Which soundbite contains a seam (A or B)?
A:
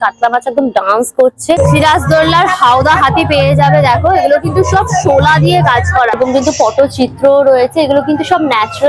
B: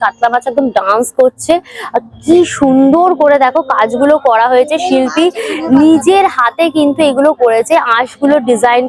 A